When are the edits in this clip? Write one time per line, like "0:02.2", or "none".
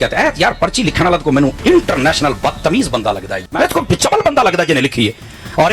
0:03.4

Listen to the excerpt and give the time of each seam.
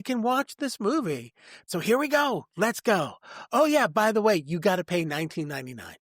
0:01.7

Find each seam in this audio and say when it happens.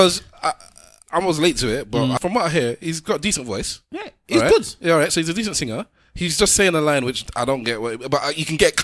0:02.2

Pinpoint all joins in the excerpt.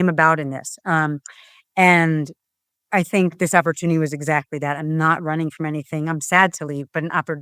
none

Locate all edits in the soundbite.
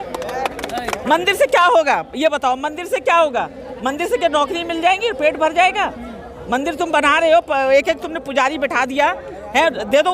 0:01.0

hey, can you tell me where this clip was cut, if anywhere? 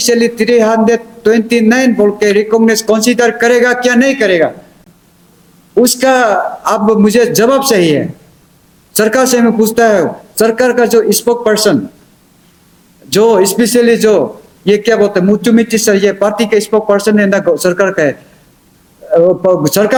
none

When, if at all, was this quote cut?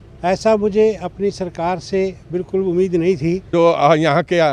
0:03.4

